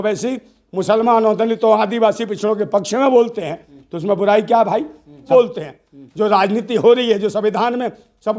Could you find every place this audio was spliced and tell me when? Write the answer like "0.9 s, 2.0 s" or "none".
5.2 s

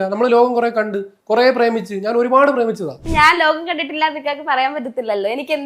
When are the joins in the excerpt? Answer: 3.0 s

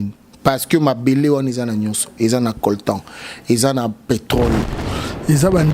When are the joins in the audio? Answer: 4.8 s

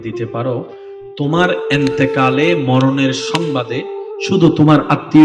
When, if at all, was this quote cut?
none

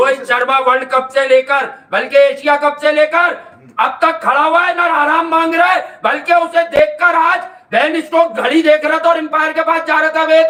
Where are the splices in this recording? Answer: none

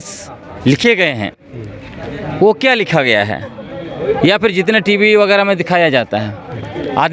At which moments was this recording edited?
none

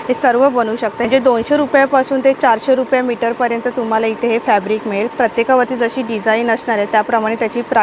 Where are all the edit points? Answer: 1.0 s

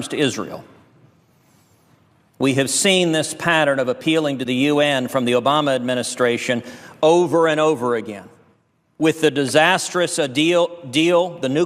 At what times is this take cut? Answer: 7.3 s

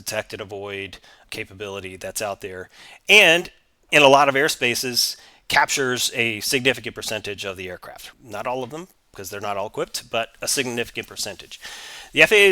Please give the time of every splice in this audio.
3.9 s, 8.0 s

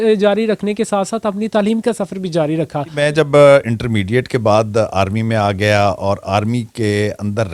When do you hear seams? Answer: 3.0 s

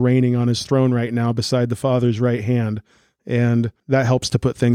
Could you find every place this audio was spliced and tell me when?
3.8 s

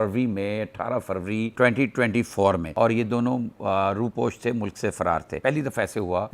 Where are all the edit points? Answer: 2.7 s, 5.3 s

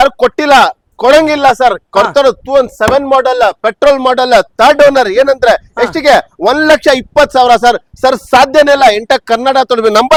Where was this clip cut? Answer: none

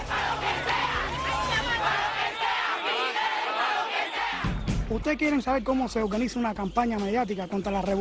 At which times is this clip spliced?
none

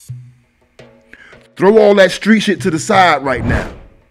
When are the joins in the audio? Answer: none

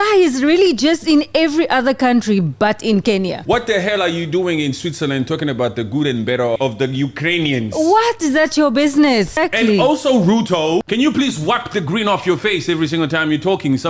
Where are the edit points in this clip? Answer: 3.4 s, 6.6 s, 9.4 s, 10.8 s

